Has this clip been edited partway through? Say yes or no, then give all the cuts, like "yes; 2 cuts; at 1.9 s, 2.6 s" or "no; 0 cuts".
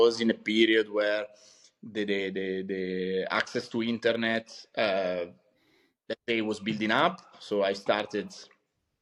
no; 0 cuts